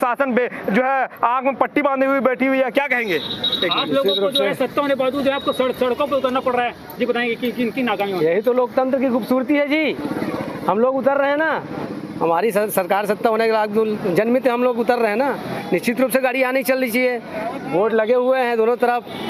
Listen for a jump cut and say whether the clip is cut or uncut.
uncut